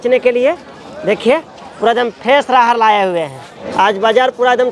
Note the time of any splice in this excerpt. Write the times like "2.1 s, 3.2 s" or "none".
3.7 s